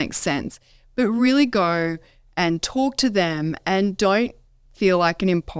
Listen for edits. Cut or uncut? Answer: uncut